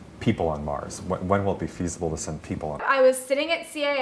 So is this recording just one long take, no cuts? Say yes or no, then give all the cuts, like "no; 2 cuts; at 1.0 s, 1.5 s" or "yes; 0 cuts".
no; 1 cut; at 2.8 s